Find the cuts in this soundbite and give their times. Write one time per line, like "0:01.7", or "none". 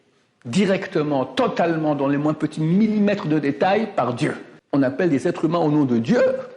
0:04.5

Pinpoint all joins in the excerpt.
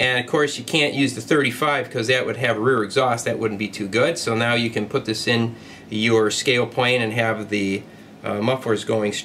0:01.9

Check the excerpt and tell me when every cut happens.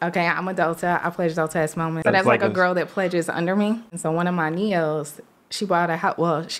0:02.0
0:03.9

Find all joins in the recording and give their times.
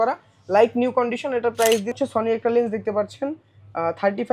0:01.9

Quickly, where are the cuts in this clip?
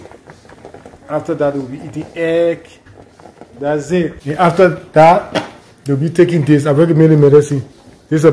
0:04.2

